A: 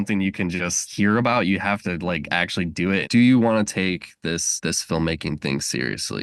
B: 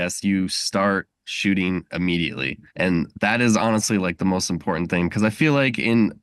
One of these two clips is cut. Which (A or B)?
A